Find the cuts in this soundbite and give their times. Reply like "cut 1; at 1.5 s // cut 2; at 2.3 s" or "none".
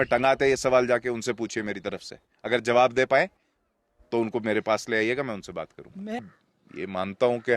cut 1; at 6.2 s